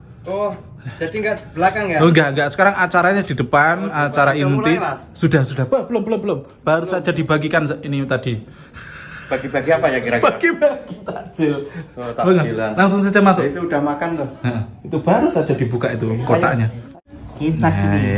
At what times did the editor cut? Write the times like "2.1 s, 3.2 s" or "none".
16.9 s